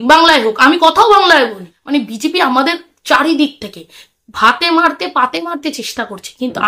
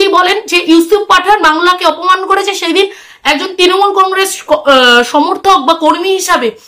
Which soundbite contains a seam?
first; 1 cut; at 1.7 s

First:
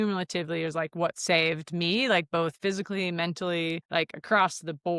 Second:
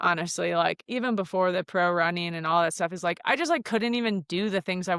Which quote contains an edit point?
first; 1 cut; at 3.8 s

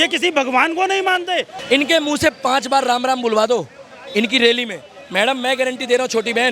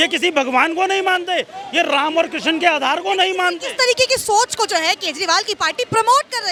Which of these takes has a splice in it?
first; 1 cut; at 1.5 s

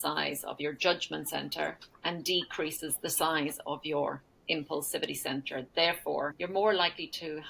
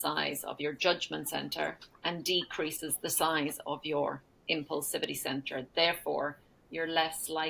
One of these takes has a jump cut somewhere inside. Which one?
first; 1 cut; at 6.4 s

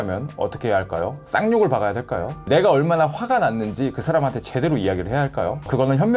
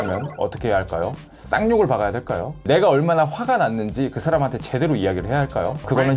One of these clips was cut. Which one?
first; 1 cut; at 1.2 s

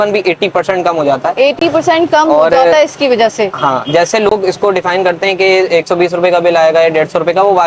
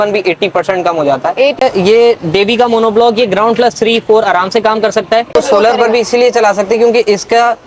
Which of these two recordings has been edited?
second; 2 cuts; at 1.6 s, 5.3 s

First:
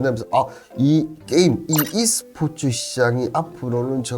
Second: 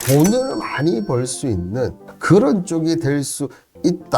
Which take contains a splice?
second; 1 cut; at 2.1 s

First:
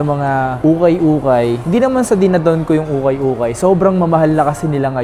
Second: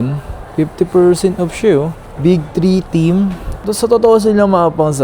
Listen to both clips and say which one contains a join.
second; 1 cut; at 3.6 s

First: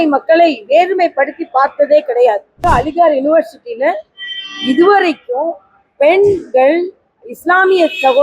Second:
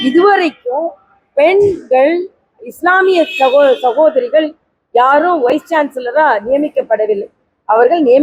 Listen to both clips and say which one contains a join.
first; 1 cut; at 2.6 s

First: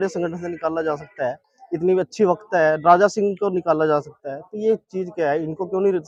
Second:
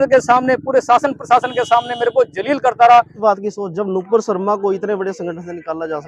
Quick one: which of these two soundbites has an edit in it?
second; 1 cut; at 3.1 s

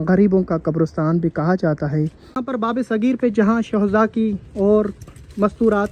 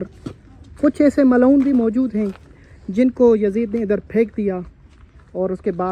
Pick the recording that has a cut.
first; 1 cut; at 2.2 s

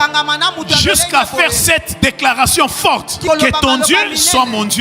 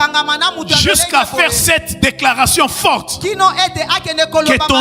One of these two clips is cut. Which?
first; 1 cut; at 3.2 s

